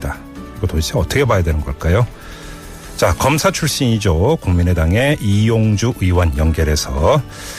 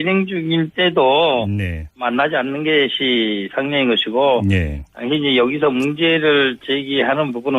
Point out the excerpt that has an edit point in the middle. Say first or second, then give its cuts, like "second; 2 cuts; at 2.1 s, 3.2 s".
first; 1 cut; at 4.2 s